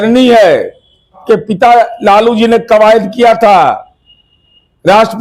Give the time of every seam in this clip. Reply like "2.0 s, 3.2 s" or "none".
1.2 s